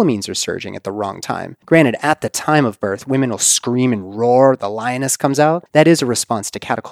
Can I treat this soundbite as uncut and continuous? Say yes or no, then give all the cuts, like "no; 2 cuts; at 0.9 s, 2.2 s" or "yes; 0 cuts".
no; 2 cuts; at 1.5 s, 5.6 s